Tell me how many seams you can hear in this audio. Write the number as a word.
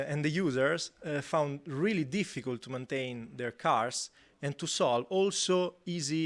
zero